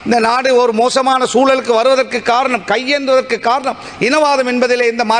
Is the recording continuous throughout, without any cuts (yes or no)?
yes